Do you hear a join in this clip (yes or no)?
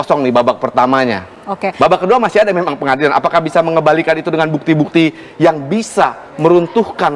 no